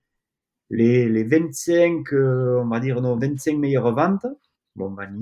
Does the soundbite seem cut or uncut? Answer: uncut